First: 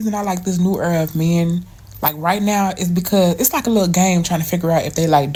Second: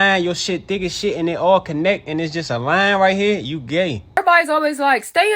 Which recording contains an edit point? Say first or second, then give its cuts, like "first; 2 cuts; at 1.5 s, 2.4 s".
second; 1 cut; at 4.0 s